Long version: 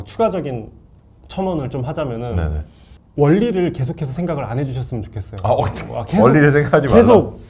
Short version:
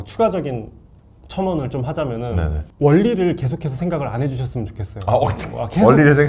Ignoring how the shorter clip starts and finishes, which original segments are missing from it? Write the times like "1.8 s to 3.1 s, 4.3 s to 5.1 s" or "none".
2.6 s to 3.0 s